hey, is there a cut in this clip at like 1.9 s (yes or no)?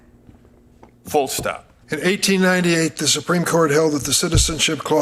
yes